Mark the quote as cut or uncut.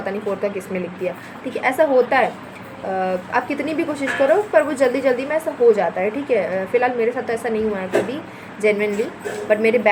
uncut